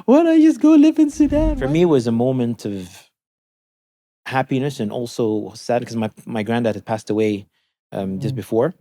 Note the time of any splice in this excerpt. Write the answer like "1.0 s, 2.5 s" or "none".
1.5 s